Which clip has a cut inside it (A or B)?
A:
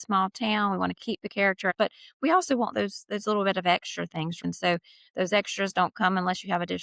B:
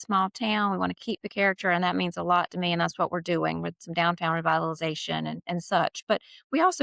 A